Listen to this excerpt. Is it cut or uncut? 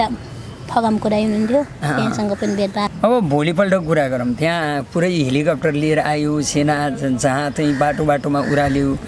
cut